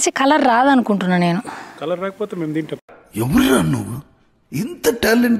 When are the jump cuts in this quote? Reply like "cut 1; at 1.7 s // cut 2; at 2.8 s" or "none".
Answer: none

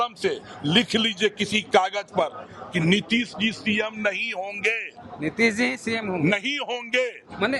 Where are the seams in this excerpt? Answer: none

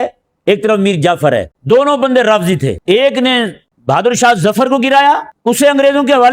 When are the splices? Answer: cut 1; at 1.5 s // cut 2; at 2.8 s // cut 3; at 3.7 s // cut 4; at 5.3 s

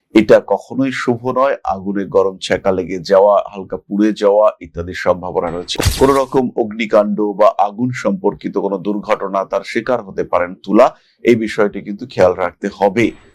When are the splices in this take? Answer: cut 1; at 5.7 s

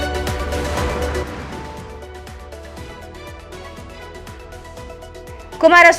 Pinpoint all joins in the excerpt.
cut 1; at 2.0 s

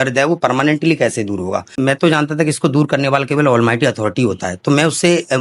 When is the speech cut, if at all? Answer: cut 1; at 1.7 s

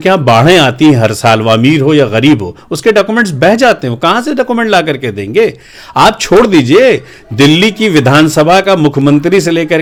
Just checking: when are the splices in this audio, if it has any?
none

